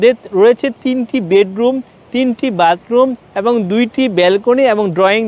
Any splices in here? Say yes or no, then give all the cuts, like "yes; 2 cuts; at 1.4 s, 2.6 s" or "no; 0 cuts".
no; 0 cuts